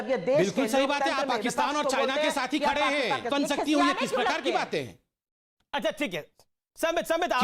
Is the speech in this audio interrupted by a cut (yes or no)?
yes